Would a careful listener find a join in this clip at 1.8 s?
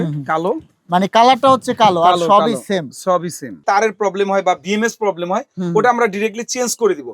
no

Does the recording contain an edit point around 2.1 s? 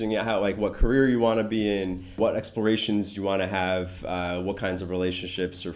yes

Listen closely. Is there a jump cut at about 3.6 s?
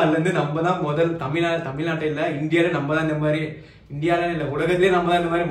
no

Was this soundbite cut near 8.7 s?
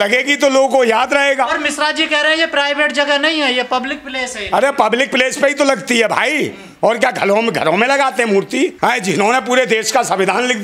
yes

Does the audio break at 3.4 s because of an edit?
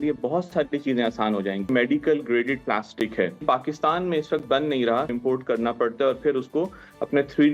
yes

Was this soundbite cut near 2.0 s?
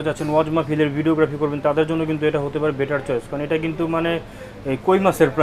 no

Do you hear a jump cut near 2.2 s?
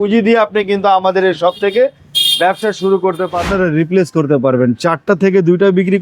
no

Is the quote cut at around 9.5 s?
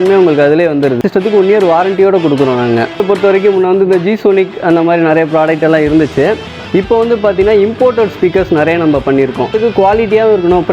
yes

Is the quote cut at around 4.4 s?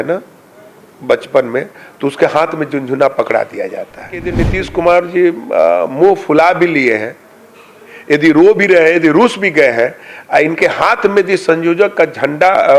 yes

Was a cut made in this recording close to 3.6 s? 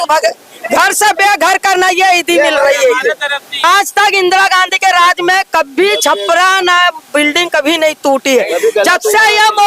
yes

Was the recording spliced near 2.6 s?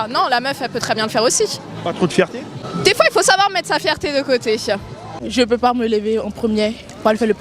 yes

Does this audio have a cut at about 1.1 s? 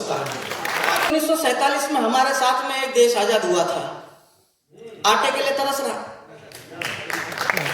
yes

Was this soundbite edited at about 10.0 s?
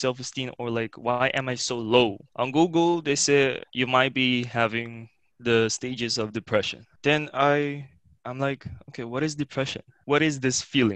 yes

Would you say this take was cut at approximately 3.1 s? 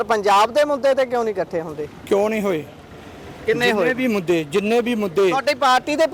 no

